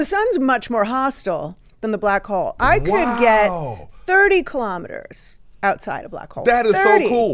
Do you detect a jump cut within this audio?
no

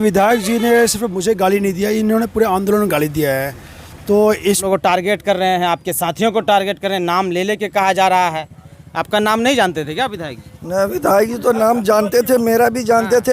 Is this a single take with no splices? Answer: no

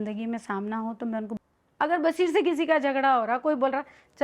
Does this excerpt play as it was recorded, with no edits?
no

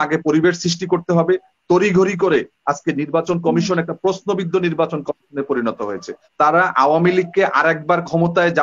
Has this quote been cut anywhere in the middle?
yes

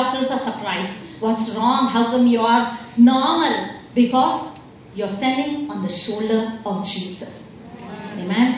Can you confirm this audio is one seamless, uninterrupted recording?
yes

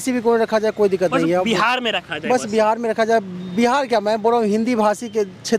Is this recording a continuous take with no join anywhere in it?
yes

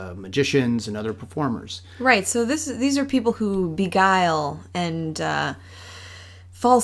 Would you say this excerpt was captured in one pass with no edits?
no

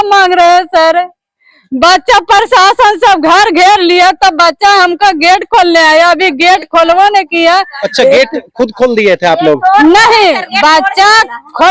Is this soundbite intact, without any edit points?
yes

